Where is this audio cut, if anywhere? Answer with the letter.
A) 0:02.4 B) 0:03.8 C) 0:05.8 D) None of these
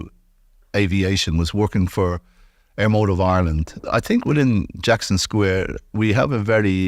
B